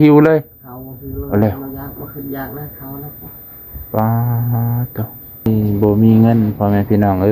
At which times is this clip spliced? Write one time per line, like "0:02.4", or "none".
0:05.5